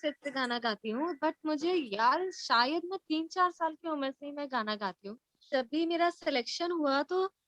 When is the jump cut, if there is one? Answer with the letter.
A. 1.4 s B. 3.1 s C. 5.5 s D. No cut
C